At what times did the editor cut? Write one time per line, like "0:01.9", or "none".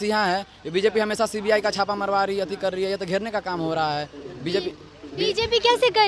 none

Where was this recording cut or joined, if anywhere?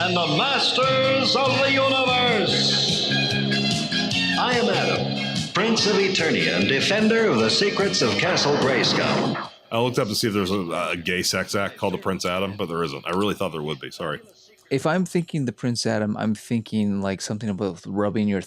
0:09.3

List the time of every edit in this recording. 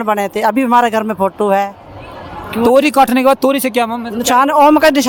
none

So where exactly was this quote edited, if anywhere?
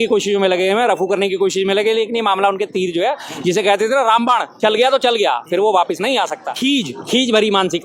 0:06.4

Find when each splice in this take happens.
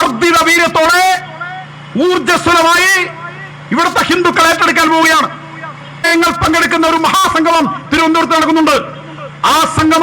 0:06.1

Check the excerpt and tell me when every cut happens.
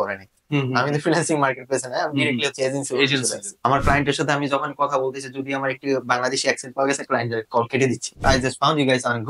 0:03.5
0:08.2

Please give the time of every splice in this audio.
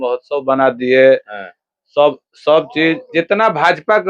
0:03.0

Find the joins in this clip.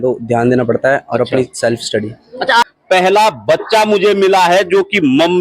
0:02.7

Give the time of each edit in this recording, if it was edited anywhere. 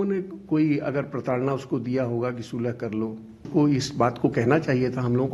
0:03.5

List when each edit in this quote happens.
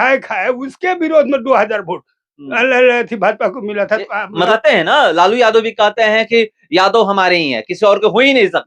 0:04.5

